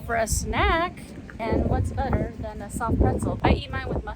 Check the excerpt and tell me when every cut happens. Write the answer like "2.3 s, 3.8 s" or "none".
1.4 s, 3.4 s